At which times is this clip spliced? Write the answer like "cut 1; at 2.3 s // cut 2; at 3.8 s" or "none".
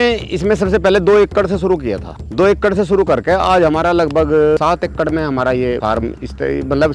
cut 1; at 4.6 s // cut 2; at 5.8 s